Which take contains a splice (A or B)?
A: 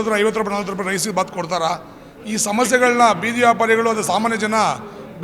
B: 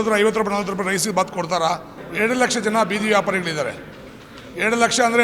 B